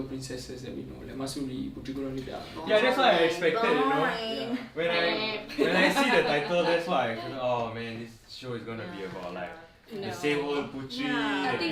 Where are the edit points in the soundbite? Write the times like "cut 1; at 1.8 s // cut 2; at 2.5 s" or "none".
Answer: none